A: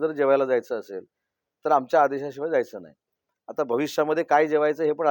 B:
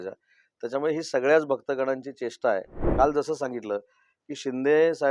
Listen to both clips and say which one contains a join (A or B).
B